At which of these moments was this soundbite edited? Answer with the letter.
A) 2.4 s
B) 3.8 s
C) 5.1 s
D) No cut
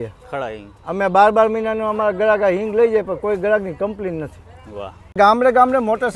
C